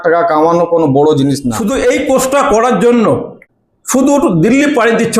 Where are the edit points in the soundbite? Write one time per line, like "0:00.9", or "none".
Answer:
0:01.5
0:03.4